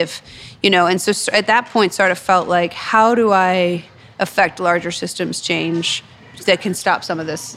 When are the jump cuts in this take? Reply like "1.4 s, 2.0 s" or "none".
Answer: 6.2 s